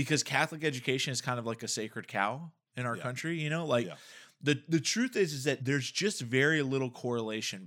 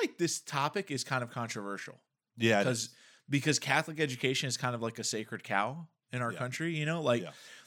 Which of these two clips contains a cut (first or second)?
first